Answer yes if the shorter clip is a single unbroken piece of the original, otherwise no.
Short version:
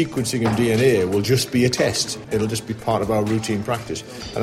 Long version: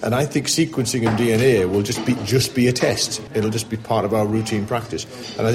no